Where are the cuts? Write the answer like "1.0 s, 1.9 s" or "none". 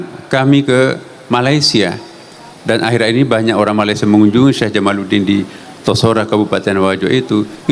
none